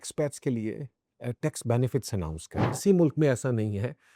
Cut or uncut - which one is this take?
cut